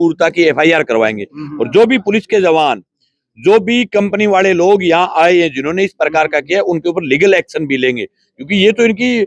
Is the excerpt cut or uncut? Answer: uncut